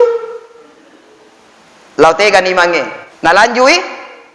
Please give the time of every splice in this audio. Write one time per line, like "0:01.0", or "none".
0:03.0